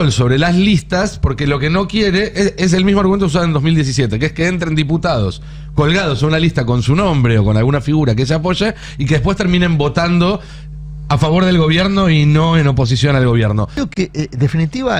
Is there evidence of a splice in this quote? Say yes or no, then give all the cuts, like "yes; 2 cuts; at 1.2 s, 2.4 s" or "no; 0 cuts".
yes; 1 cut; at 13.8 s